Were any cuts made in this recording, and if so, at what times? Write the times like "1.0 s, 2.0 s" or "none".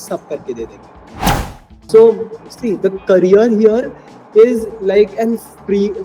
1.4 s